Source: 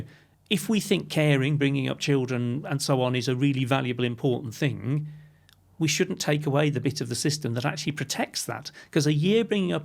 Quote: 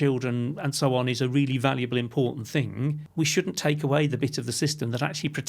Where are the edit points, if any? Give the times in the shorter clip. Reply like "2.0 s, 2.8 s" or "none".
3.0 s